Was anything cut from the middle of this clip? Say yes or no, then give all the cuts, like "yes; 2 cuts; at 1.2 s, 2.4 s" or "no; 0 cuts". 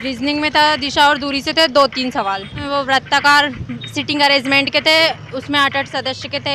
yes; 1 cut; at 2.6 s